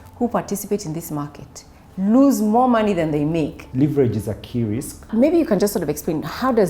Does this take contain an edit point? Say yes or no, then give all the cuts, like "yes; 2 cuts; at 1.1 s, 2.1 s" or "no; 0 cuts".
yes; 2 cuts; at 3.6 s, 5.1 s